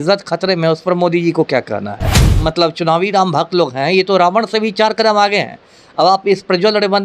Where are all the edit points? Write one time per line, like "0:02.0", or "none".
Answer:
0:02.2